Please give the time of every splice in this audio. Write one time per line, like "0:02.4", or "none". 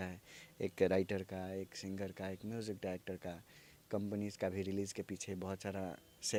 none